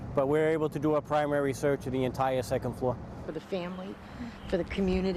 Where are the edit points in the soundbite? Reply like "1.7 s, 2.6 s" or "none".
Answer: 3.2 s